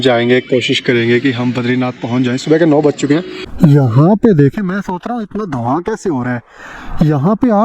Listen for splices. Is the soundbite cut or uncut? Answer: cut